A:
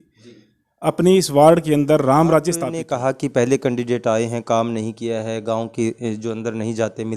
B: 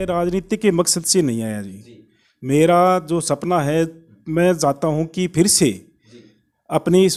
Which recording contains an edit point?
A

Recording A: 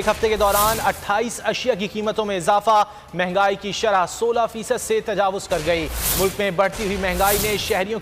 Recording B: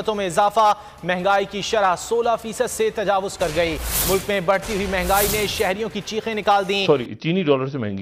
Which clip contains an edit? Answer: B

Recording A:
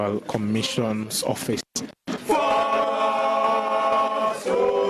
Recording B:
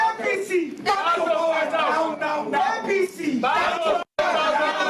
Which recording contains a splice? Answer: A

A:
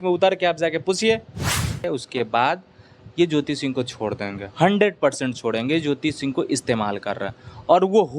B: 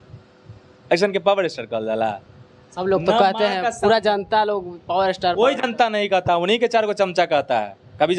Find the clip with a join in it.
A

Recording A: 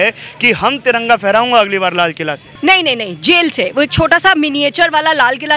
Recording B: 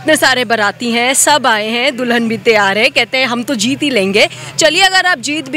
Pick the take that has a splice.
A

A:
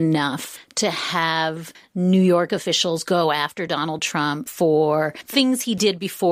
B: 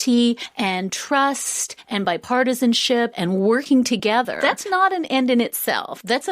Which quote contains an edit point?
B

